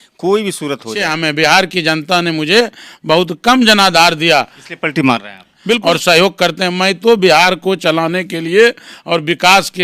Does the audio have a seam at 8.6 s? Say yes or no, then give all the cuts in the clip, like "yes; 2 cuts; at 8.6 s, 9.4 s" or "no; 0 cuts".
no; 2 cuts; at 1.1 s, 5.8 s